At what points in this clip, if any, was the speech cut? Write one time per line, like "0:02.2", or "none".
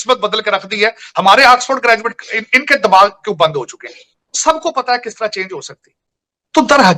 none